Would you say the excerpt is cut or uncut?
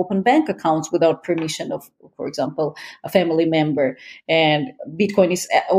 uncut